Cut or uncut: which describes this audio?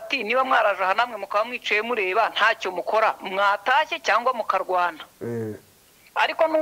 uncut